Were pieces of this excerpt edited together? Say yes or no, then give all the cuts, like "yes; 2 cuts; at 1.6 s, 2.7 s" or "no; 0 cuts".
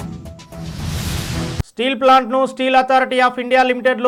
no; 0 cuts